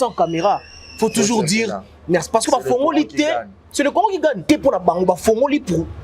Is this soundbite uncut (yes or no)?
no